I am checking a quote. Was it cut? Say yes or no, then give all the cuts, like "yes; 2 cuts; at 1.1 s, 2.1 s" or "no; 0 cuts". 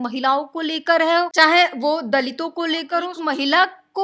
yes; 2 cuts; at 1.3 s, 3.1 s